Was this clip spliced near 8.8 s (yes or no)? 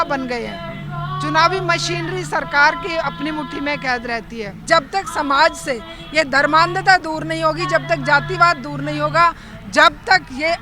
no